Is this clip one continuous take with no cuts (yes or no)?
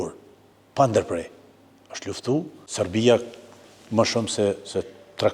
no